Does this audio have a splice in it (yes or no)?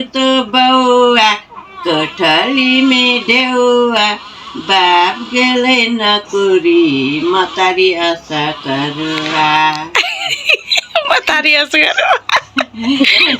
no